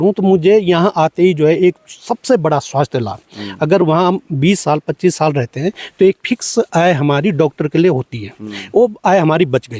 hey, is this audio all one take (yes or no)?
yes